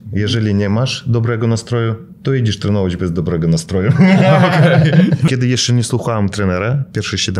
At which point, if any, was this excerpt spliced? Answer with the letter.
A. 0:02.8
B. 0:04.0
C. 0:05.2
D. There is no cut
C